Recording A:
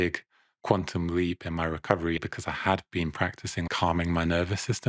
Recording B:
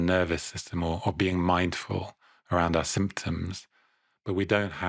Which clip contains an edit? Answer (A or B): A